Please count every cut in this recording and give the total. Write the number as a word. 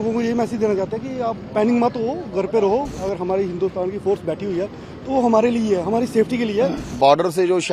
two